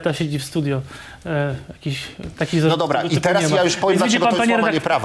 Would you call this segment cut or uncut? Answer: uncut